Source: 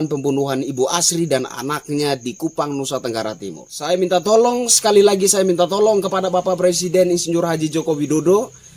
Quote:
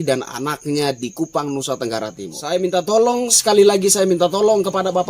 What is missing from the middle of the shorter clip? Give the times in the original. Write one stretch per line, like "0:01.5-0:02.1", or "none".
0:03.5-0:03.7